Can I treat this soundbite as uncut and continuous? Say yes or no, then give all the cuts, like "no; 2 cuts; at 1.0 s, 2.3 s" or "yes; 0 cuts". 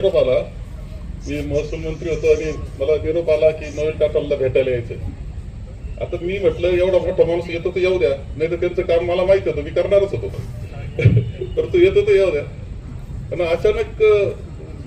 yes; 0 cuts